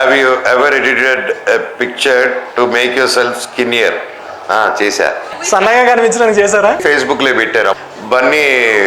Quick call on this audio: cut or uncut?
cut